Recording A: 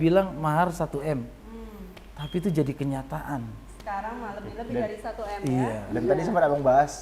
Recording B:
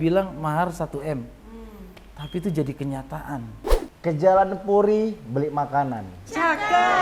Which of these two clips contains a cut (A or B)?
B